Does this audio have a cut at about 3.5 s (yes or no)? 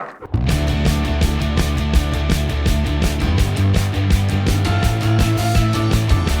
no